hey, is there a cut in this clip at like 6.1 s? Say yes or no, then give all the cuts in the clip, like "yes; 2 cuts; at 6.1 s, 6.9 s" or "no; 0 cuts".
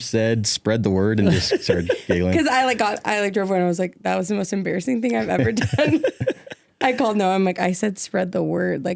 no; 0 cuts